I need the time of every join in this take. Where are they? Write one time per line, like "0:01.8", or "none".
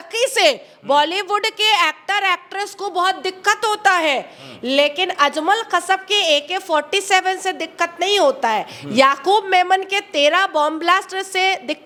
none